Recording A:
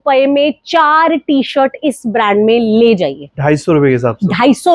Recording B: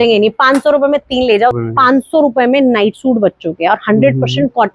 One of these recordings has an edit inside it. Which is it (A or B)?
B